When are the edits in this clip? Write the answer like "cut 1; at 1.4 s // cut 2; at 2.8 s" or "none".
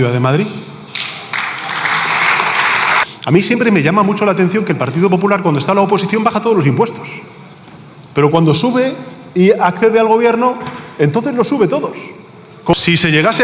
cut 1; at 3.0 s // cut 2; at 12.7 s

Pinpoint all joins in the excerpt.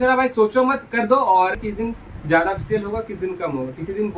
cut 1; at 1.6 s

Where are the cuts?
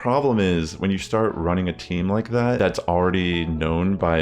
cut 1; at 2.6 s

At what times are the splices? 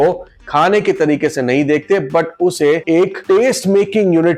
none

